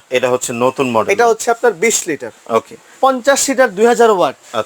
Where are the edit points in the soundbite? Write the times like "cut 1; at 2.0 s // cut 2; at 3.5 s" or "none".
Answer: cut 1; at 2.9 s